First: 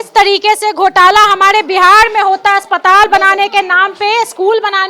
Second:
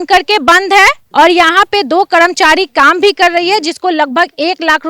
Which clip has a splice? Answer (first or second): second